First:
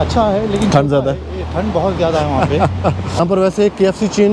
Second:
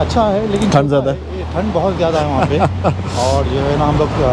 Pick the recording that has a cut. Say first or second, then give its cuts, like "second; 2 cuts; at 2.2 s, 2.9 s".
first; 1 cut; at 3.2 s